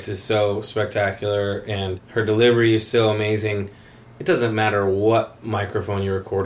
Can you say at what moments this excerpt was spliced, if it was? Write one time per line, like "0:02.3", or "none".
none